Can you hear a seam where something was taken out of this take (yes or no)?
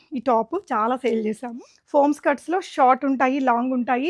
yes